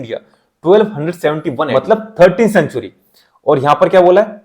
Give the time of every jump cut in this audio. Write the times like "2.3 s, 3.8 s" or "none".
1.7 s